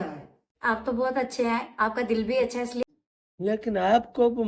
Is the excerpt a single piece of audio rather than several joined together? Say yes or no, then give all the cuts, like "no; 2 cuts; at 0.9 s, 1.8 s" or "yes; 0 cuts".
no; 1 cut; at 2.8 s